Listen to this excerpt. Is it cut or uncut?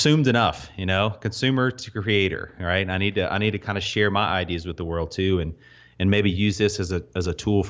uncut